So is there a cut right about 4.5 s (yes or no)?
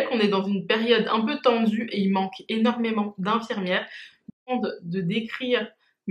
yes